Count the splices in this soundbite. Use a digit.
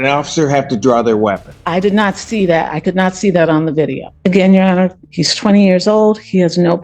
2